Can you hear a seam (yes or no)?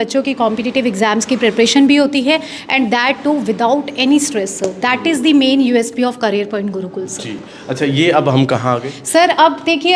no